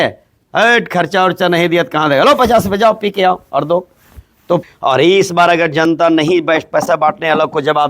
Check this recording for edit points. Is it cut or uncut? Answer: cut